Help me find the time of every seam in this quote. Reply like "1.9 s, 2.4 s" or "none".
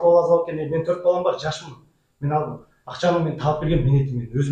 none